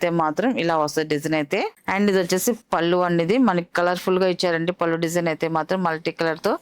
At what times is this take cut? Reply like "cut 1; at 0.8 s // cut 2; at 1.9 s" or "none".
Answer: none